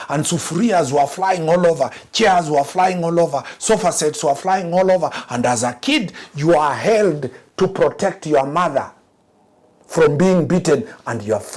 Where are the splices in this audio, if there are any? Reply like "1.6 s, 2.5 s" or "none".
none